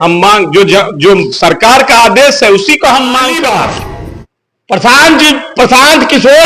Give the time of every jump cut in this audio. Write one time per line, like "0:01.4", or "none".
0:03.3